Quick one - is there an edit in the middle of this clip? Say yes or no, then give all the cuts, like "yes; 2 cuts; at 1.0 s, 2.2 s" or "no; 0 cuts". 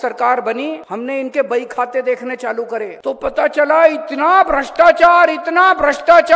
yes; 2 cuts; at 0.9 s, 2.9 s